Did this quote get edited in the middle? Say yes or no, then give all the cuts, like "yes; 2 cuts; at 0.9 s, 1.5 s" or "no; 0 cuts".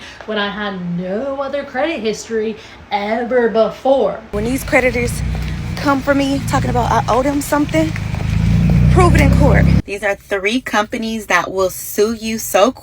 yes; 2 cuts; at 4.2 s, 9.8 s